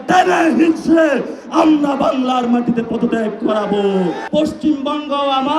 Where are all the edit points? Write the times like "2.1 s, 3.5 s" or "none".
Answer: 4.2 s